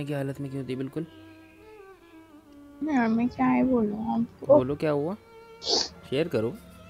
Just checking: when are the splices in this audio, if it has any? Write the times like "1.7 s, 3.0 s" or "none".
none